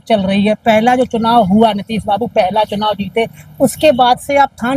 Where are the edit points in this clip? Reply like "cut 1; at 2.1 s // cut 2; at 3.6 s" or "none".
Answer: none